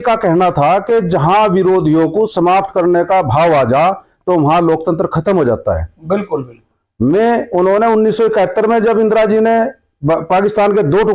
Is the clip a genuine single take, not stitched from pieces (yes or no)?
yes